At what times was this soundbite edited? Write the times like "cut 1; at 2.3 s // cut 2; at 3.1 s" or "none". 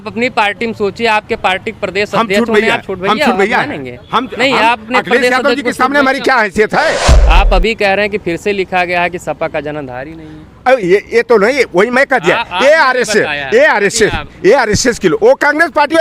cut 1; at 7.1 s